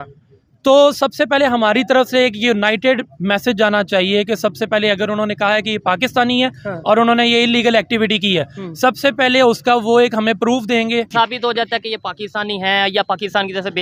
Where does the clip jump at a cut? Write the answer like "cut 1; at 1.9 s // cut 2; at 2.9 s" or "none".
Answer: cut 1; at 11.1 s